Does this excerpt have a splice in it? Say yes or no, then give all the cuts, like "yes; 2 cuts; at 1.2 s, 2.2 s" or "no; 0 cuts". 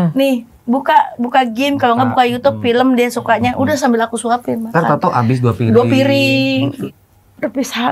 yes; 1 cut; at 6.8 s